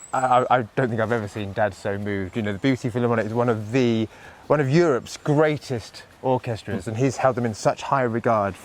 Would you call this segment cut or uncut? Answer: uncut